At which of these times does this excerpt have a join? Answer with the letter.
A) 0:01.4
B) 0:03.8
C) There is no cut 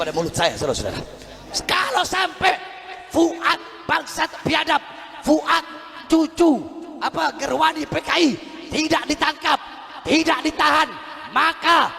A